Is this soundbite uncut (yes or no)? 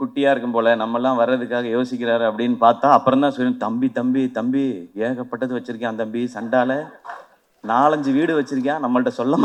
yes